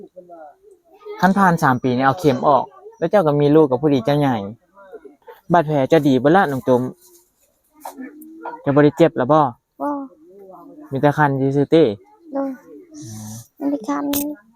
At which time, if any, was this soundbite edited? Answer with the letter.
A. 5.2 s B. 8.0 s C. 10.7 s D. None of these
A